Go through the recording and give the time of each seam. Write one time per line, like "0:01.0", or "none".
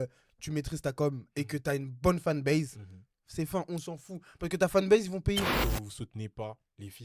0:05.6